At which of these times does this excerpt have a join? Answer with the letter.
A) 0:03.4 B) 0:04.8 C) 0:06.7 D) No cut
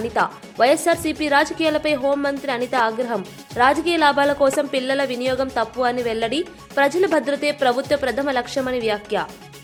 D